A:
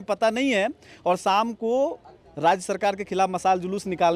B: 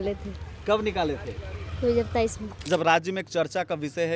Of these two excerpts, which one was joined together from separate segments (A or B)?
B